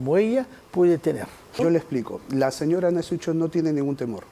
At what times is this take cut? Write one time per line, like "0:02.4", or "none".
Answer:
0:01.6